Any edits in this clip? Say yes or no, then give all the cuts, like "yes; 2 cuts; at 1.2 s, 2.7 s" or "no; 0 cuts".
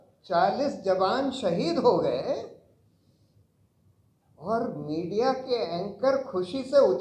no; 0 cuts